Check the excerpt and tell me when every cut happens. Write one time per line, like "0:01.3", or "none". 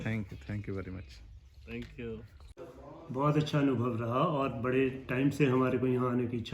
0:02.4